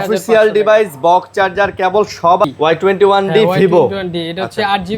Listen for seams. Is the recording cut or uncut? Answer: cut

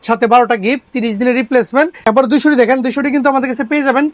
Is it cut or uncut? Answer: cut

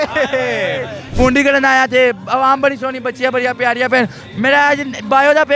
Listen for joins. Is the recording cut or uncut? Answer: cut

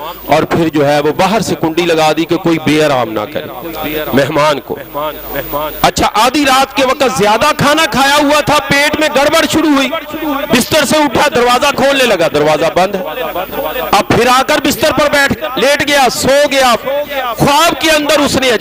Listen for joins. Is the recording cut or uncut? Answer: uncut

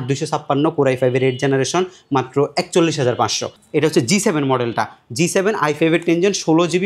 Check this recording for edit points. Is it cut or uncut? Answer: cut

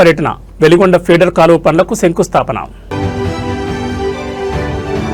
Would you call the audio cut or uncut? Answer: uncut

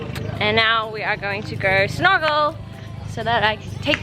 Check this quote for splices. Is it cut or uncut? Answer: uncut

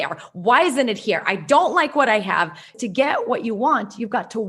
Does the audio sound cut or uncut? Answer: cut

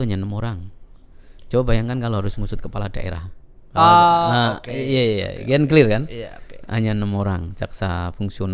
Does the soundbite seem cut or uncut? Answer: uncut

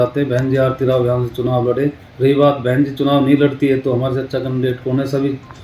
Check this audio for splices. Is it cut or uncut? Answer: cut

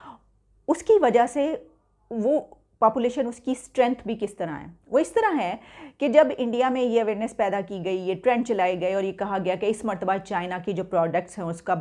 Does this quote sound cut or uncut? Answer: uncut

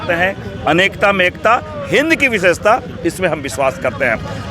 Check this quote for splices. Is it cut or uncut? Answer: uncut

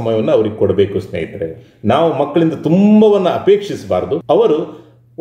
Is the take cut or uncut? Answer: cut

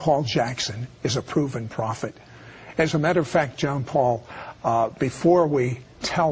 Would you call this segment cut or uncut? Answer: uncut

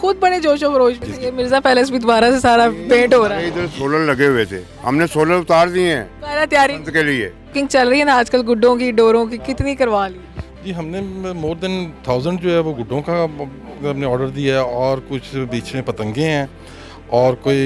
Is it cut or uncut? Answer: cut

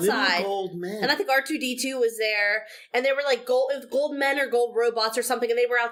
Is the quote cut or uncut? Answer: uncut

